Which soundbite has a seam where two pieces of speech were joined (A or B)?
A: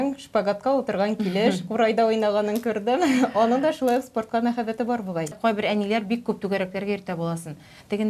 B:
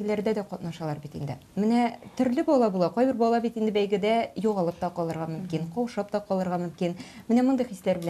A